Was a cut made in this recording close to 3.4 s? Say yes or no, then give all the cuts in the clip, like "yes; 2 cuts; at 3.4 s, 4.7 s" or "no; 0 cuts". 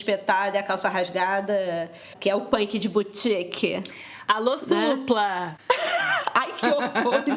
no; 2 cuts; at 2.1 s, 5.5 s